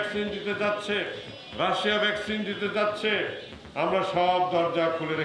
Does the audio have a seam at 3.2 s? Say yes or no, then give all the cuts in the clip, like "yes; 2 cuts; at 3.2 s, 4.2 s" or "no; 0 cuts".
no; 0 cuts